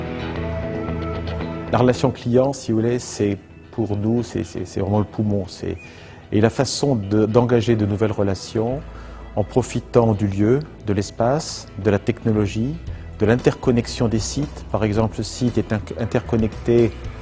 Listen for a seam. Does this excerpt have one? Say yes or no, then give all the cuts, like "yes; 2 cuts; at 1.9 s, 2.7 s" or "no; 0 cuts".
no; 0 cuts